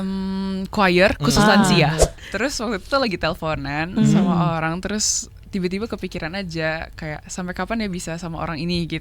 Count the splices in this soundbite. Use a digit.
1